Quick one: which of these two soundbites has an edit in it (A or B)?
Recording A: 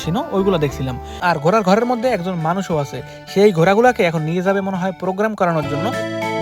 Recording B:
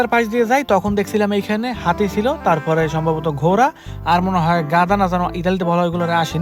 A